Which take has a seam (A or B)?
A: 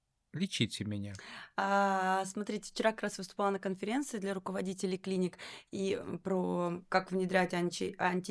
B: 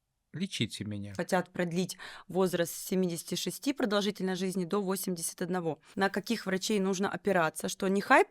B